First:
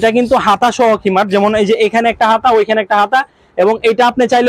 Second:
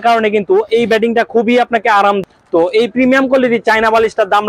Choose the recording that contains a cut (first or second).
second